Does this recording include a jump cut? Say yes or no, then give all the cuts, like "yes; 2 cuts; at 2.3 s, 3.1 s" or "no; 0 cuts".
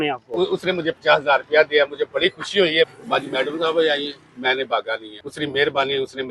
yes; 2 cuts; at 2.9 s, 5.2 s